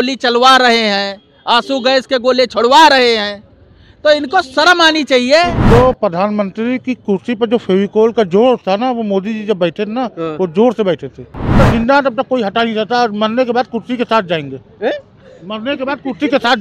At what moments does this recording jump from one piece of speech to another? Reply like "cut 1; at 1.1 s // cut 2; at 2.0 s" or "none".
cut 1; at 5.6 s // cut 2; at 11.4 s